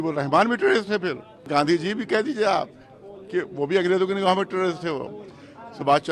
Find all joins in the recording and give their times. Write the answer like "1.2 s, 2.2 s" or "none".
1.5 s